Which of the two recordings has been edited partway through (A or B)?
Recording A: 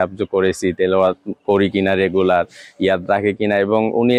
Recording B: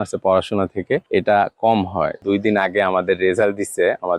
B